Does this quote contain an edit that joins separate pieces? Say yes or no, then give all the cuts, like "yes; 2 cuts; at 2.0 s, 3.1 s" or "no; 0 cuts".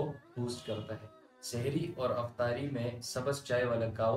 yes; 1 cut; at 1.3 s